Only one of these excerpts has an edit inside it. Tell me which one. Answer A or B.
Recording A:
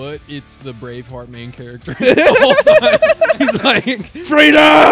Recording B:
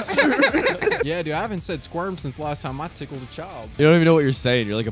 B